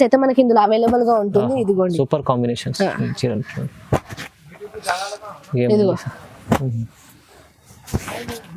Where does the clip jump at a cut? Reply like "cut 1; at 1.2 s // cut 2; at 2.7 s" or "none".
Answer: none